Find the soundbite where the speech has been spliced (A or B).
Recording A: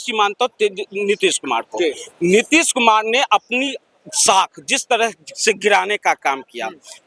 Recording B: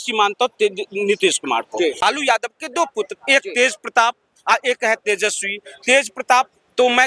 B